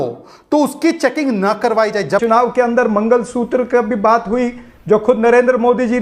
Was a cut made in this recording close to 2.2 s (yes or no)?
yes